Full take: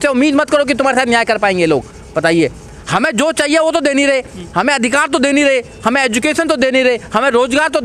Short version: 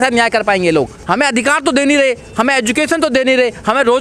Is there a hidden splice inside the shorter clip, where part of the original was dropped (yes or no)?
yes